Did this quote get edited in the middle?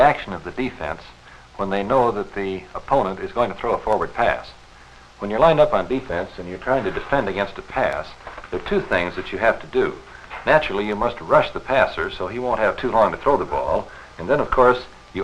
no; 0 cuts

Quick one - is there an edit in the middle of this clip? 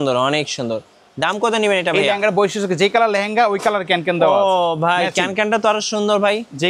no; 0 cuts

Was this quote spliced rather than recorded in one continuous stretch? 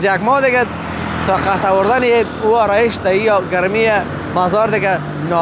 no; 0 cuts

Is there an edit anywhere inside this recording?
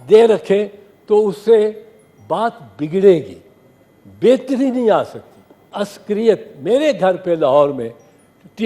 yes; 1 cut; at 5.7 s

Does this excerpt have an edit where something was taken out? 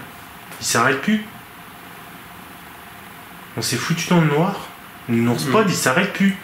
no; 0 cuts

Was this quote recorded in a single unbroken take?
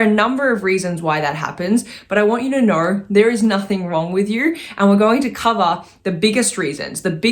yes; 0 cuts

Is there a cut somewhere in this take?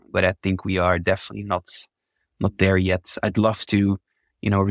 no; 0 cuts

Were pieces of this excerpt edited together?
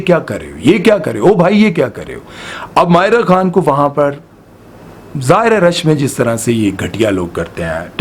no; 0 cuts

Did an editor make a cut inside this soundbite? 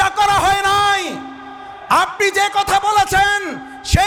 no; 0 cuts

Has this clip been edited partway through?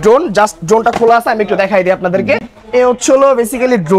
no; 0 cuts

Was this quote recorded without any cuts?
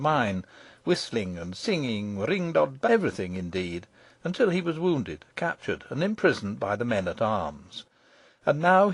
yes; 0 cuts

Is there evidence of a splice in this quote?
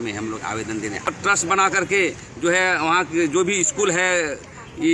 yes; 1 cut; at 1.1 s

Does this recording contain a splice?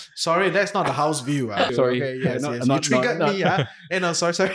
yes; 1 cut; at 1.7 s

